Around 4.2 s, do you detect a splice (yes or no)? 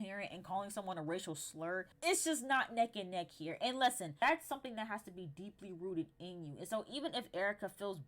yes